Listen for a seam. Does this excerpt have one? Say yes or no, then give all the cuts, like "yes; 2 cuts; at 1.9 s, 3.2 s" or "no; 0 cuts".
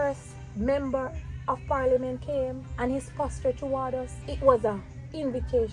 yes; 2 cuts; at 2.6 s, 4.2 s